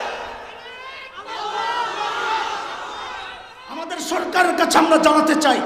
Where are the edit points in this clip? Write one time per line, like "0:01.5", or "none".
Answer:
0:03.9